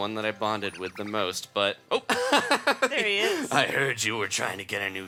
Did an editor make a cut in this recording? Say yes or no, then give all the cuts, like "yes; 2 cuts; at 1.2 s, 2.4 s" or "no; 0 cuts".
no; 0 cuts